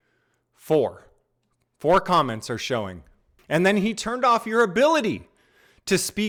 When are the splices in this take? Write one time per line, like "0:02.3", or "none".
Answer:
none